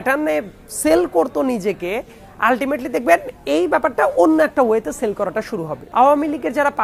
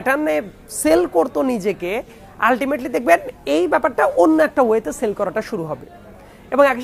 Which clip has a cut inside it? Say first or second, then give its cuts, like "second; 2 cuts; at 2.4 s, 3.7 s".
first; 1 cut; at 5.7 s